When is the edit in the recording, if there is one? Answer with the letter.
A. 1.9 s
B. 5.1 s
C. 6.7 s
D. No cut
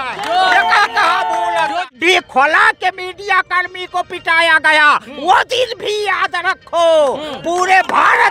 A